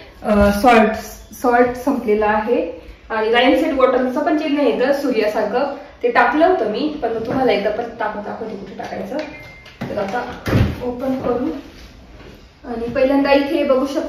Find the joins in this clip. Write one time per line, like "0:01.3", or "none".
none